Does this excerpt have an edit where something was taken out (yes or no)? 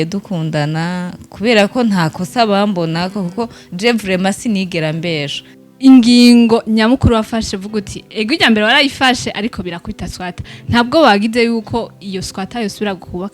yes